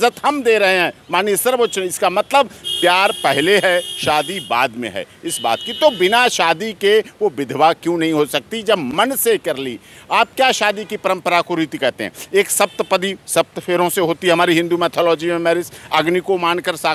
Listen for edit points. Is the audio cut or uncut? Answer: uncut